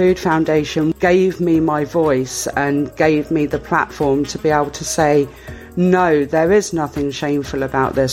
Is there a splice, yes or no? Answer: yes